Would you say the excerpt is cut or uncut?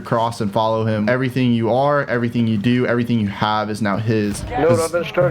cut